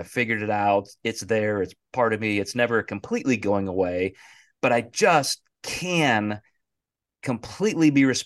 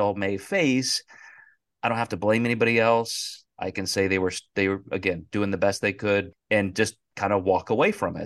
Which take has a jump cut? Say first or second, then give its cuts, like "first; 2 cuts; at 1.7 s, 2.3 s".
second; 1 cut; at 6.4 s